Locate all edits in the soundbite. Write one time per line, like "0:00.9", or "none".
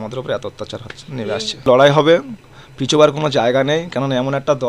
0:01.6